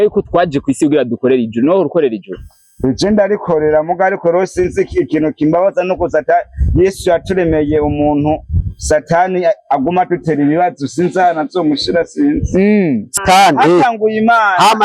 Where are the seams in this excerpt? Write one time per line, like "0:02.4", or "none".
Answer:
0:13.2